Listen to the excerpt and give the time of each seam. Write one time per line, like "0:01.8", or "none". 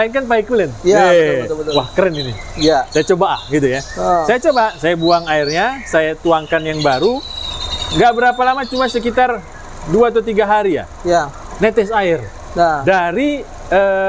none